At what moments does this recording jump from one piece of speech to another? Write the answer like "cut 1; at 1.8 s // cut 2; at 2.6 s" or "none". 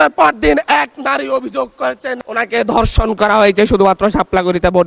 none